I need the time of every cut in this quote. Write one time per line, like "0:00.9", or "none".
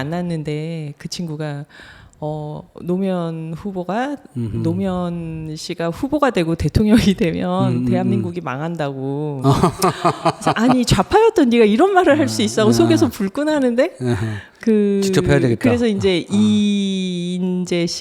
none